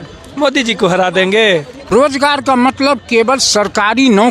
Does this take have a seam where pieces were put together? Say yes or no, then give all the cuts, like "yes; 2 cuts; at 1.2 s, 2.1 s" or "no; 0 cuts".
yes; 1 cut; at 1.9 s